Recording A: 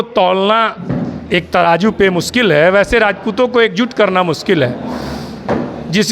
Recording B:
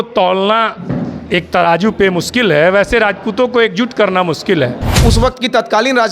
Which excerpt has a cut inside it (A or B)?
B